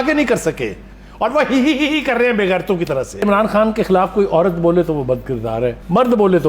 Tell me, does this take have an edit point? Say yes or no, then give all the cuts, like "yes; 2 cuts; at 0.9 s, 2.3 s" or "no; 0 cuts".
yes; 1 cut; at 3.2 s